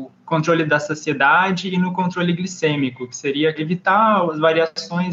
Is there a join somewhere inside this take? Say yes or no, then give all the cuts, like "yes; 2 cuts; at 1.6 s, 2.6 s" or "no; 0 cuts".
yes; 1 cut; at 3.6 s